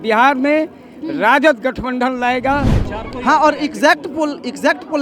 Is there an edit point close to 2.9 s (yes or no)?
yes